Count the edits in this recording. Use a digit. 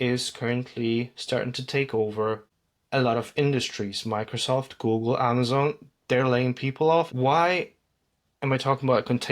1